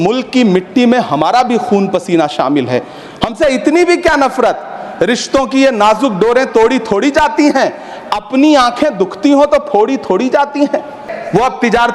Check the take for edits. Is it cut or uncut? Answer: cut